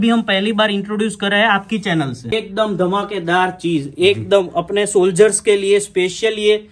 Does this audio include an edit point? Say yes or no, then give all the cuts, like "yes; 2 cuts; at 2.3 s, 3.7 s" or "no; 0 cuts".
yes; 1 cut; at 2.3 s